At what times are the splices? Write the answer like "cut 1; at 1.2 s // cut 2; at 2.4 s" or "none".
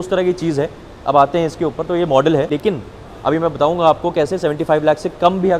cut 1; at 2.5 s